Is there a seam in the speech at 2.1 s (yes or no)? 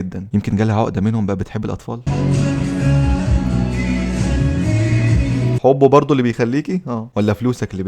yes